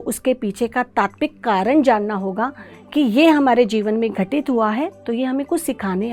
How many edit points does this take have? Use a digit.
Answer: 0